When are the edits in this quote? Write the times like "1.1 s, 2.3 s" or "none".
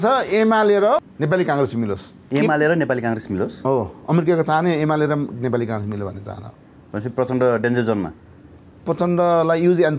1.1 s, 2.1 s